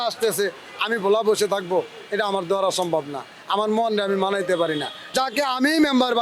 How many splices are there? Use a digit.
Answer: 1